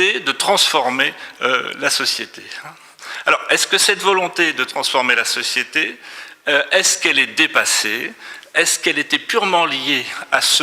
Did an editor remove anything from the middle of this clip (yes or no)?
no